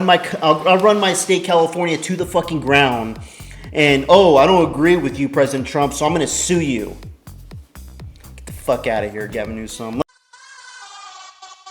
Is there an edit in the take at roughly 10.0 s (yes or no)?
yes